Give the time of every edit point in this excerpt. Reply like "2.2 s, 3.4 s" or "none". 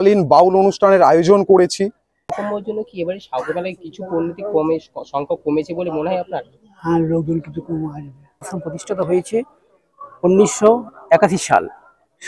2.3 s, 8.6 s